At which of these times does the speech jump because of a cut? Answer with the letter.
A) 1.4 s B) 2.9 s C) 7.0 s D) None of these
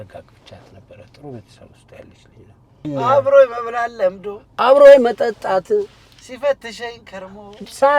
B